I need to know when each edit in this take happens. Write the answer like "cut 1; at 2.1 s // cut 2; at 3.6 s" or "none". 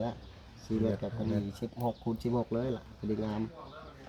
none